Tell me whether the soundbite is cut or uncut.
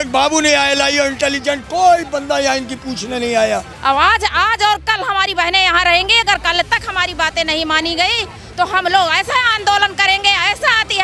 cut